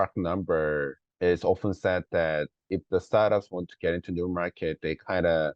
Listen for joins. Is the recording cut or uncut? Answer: cut